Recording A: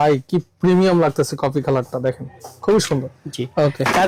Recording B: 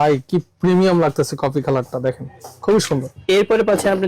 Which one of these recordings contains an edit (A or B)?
B